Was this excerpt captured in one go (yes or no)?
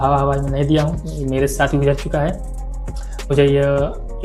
yes